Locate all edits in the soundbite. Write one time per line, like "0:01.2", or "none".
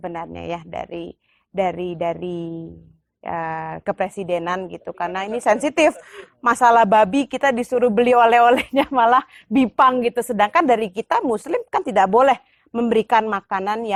none